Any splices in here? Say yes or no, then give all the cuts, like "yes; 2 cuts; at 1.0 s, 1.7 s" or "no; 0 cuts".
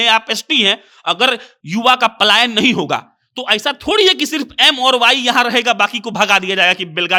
no; 0 cuts